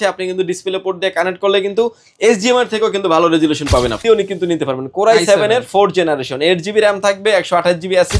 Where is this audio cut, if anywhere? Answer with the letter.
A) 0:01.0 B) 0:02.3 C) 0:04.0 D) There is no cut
C